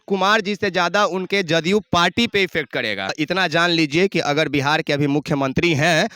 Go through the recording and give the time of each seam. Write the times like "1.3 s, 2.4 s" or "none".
3.1 s

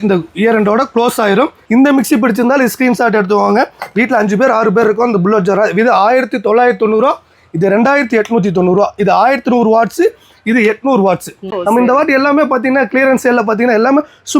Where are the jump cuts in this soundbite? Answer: 1.6 s, 11.5 s

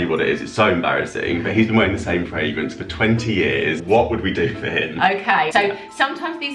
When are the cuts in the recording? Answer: 3.8 s, 5.5 s

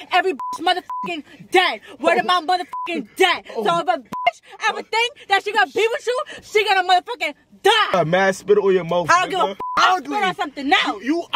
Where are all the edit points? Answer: 7.9 s, 9.6 s

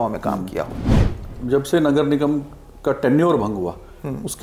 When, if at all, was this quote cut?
1.0 s

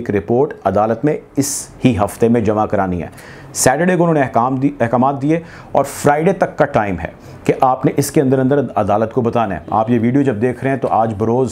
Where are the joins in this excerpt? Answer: none

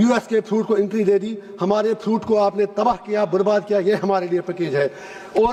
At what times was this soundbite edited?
none

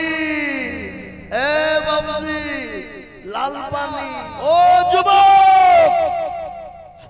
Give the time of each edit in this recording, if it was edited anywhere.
4.2 s

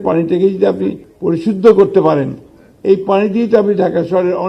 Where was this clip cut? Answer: 1.1 s

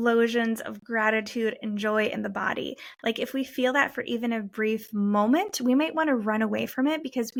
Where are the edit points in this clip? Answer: none

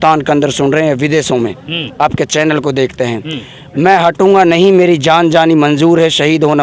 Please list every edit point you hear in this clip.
none

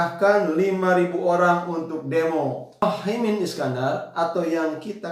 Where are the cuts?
2.8 s

